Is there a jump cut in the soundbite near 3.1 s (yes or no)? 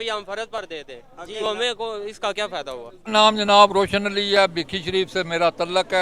yes